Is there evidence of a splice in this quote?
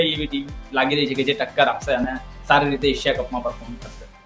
no; 0 cuts

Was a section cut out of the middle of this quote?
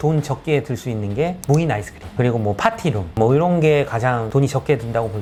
no; 0 cuts

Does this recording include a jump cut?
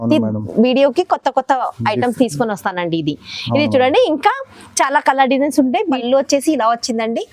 yes; 1 cut; at 6.0 s

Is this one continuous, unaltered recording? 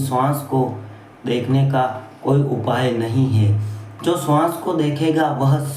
no; 1 cut; at 2.6 s

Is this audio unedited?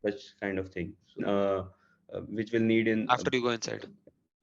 no; 1 cut; at 1.2 s

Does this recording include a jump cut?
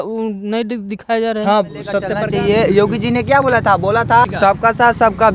yes; 2 cuts; at 2.1 s, 4.2 s

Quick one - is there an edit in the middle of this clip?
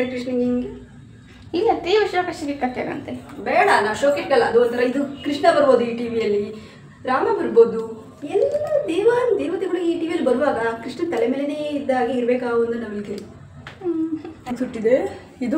yes; 1 cut; at 14.4 s

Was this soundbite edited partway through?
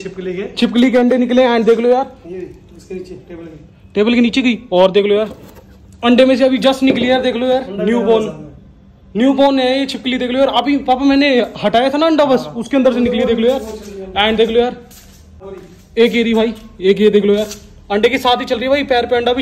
no; 0 cuts

